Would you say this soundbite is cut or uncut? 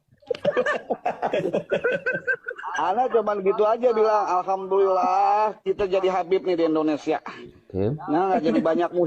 cut